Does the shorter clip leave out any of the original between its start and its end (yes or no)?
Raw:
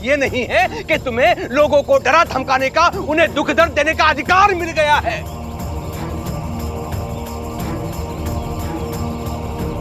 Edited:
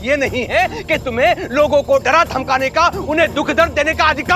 no